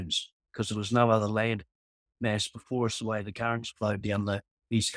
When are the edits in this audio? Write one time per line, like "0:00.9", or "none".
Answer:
none